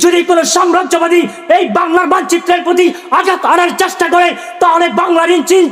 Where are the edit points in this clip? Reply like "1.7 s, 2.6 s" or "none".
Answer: 3.7 s